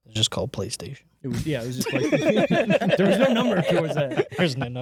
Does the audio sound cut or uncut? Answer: uncut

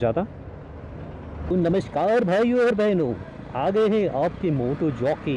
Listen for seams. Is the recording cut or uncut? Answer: cut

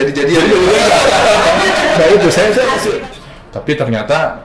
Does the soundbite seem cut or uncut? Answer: cut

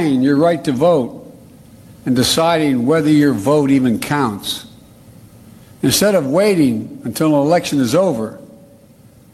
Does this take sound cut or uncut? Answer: uncut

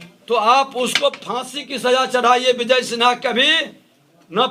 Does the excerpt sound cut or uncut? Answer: uncut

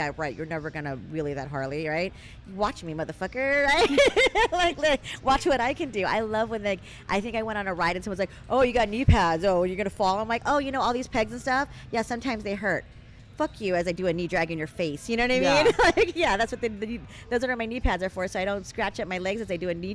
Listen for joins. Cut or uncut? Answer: uncut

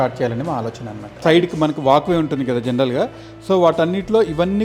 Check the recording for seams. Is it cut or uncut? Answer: cut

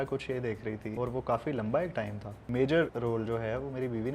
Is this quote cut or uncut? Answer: cut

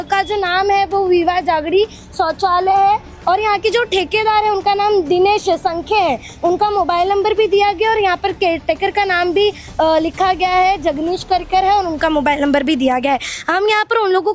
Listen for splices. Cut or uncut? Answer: uncut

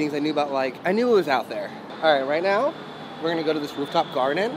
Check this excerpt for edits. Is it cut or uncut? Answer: cut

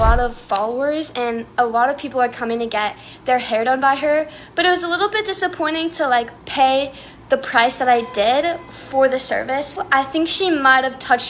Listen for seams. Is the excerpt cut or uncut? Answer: uncut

